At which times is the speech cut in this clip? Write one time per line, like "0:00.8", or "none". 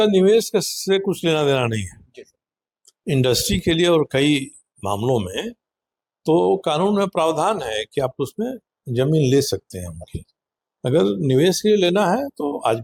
none

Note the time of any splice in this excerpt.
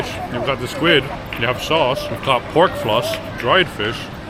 0:01.1
0:02.1
0:03.3

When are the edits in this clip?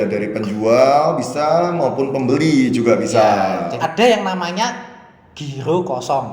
0:03.7

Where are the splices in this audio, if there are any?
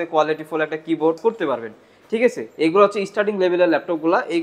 0:01.2

